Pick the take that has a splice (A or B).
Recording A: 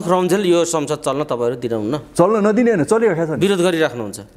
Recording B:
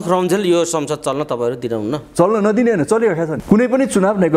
B